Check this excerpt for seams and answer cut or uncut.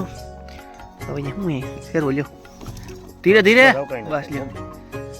uncut